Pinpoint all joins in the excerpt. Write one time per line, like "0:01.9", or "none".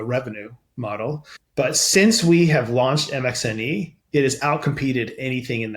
0:01.3